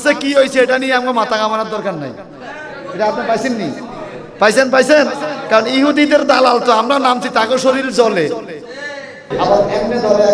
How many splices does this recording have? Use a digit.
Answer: 1